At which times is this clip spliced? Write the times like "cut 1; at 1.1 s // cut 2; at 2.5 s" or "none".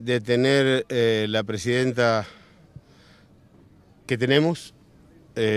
none